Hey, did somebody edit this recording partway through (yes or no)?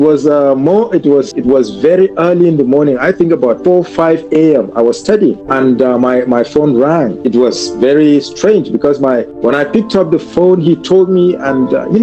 yes